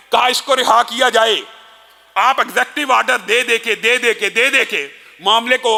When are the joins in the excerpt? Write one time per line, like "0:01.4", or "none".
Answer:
none

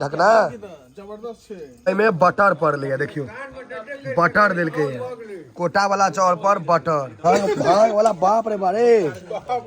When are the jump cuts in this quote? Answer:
0:01.8
0:07.1

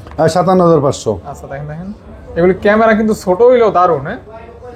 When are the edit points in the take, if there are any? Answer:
none

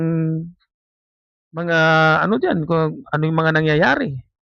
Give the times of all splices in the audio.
none

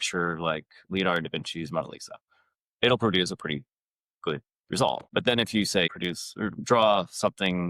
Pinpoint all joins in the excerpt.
0:05.0
0:05.9

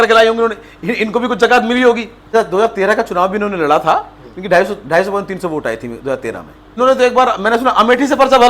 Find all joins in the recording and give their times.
0:02.2
0:06.7

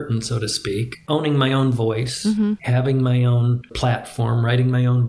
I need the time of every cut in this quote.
0:01.0
0:02.6
0:03.7

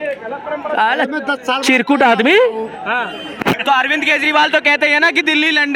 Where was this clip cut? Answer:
0:03.6

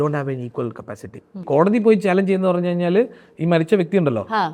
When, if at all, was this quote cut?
0:01.4

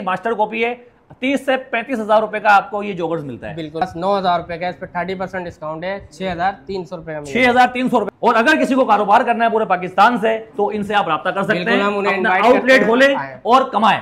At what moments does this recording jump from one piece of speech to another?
0:03.8
0:08.1

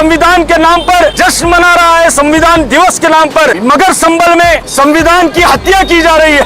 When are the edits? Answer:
0:01.1
0:03.6
0:04.7

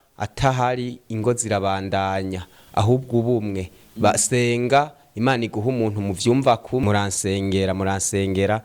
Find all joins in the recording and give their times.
0:06.8

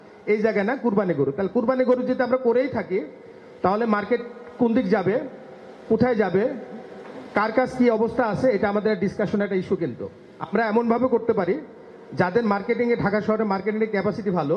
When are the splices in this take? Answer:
none

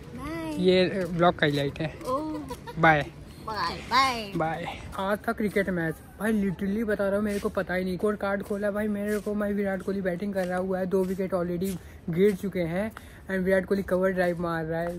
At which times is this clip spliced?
0:04.8
0:08.0

